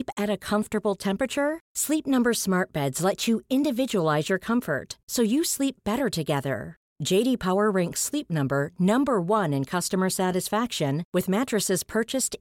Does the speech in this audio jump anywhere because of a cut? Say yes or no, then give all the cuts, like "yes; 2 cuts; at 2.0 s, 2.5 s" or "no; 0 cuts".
no; 0 cuts